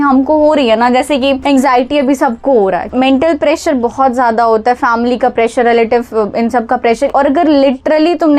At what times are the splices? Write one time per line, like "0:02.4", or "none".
0:02.9
0:07.1